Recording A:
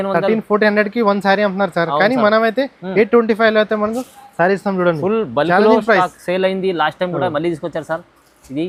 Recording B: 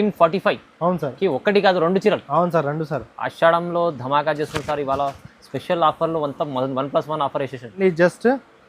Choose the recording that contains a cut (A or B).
B